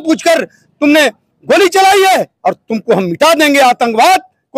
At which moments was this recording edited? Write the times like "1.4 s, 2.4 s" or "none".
2.3 s